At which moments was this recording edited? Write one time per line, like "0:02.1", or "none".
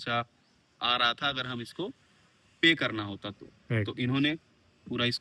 none

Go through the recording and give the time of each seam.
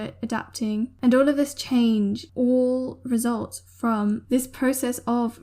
0:00.9
0:02.2

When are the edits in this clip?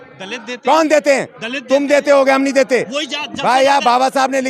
none

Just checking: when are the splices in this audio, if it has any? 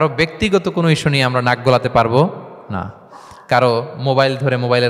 none

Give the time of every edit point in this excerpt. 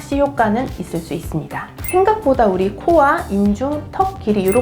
0:01.7

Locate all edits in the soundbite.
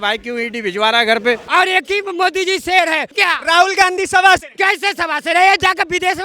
0:01.4
0:03.1
0:04.5

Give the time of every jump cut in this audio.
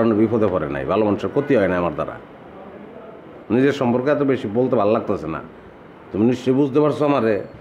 0:03.2

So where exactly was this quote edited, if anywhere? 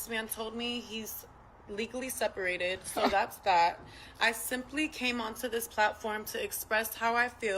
0:04.1

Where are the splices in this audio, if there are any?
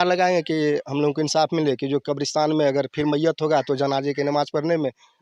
none

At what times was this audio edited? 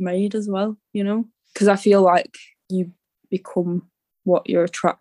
none

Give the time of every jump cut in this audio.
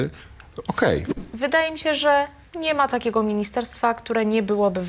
0:01.2

